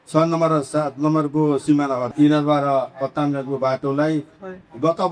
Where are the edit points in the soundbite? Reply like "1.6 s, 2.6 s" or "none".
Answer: 2.1 s